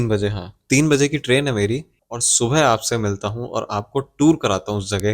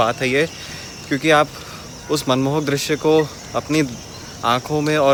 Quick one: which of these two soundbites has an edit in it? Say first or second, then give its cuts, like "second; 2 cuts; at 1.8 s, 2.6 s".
first; 1 cut; at 2.0 s